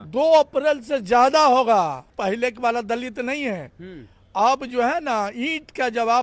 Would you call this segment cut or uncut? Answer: cut